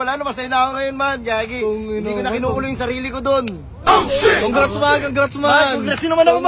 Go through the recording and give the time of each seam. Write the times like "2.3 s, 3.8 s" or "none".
none